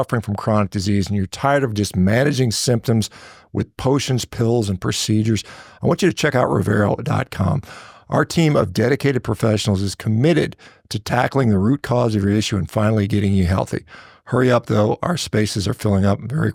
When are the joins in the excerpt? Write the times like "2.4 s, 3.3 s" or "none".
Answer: none